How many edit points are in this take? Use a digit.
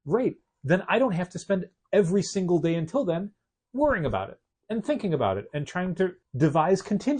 1